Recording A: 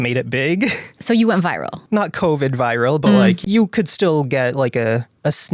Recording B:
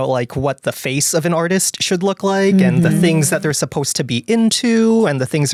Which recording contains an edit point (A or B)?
A